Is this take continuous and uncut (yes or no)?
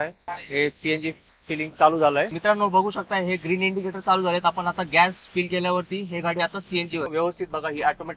no